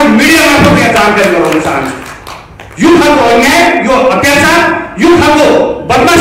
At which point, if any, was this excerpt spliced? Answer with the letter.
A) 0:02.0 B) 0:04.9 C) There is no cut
C